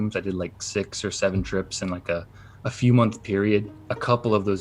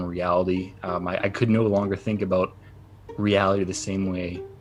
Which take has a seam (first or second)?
first